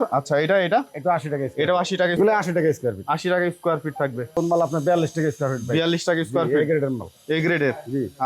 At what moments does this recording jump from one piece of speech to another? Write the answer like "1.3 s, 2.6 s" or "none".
2.2 s, 4.4 s